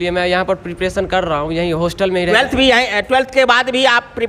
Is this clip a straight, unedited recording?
yes; 0 cuts

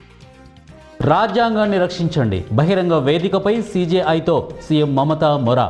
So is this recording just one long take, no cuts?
yes; 0 cuts

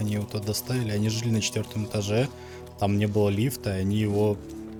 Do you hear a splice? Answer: no; 0 cuts

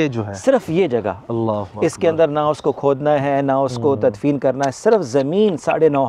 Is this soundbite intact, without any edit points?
yes; 0 cuts

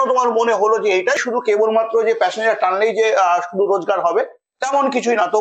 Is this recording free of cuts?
no; 1 cut; at 1.2 s

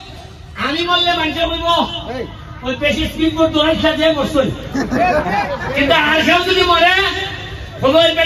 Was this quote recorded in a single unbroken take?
yes; 0 cuts

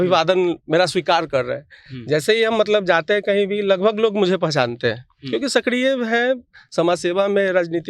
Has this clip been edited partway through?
no; 0 cuts

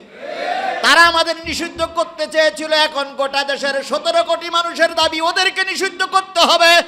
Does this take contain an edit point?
no; 0 cuts

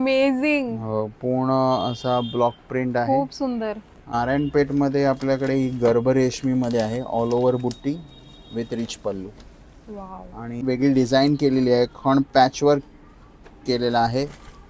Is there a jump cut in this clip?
yes; 2 cuts; at 4.1 s, 10.5 s

